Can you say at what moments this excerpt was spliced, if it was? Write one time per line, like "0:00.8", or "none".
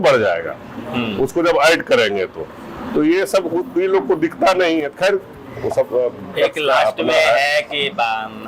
none

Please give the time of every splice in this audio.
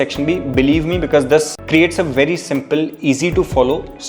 0:01.6

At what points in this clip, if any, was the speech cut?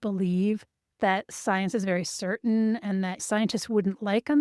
0:03.2

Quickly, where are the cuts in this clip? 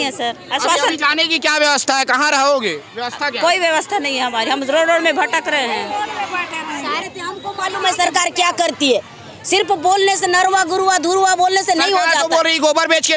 0:07.1

